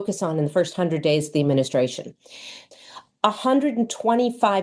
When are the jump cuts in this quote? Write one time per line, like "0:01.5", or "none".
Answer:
0:02.7